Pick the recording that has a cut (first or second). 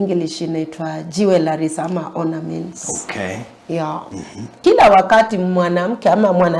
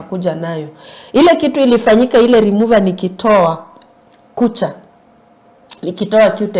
first